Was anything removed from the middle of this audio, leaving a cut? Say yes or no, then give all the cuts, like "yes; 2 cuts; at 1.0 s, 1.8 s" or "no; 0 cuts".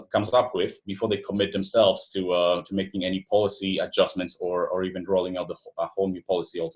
no; 0 cuts